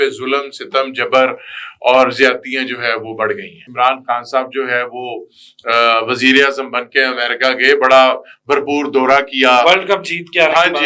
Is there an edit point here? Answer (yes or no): yes